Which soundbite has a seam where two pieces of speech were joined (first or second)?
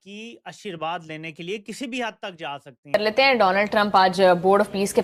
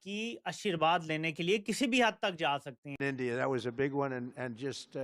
second